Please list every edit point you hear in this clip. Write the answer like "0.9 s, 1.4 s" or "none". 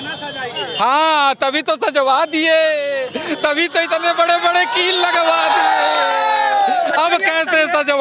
none